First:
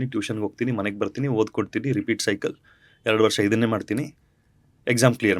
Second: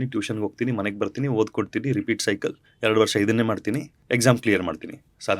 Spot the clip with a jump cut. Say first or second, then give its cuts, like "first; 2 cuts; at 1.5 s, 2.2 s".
second; 2 cuts; at 2.7 s, 3.9 s